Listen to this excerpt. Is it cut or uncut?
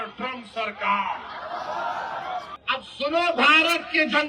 cut